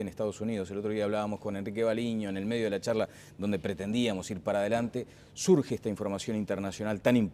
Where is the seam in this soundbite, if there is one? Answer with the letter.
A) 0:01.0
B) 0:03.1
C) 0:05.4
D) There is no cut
D